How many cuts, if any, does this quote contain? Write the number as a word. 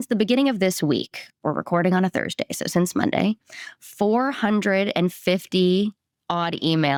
zero